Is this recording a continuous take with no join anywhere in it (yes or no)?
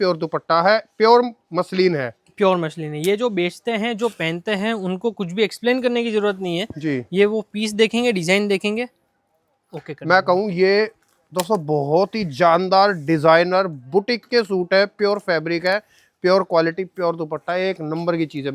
yes